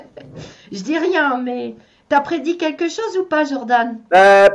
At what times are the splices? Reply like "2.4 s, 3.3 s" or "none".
none